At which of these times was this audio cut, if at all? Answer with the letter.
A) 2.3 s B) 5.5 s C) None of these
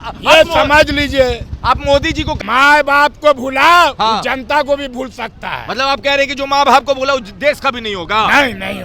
A